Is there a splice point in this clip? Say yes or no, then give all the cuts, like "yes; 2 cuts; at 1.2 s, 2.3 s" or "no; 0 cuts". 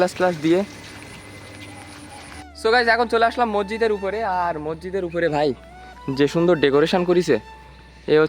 yes; 1 cut; at 2.3 s